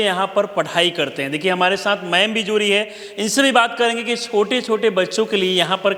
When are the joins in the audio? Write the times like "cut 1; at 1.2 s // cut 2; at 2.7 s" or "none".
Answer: none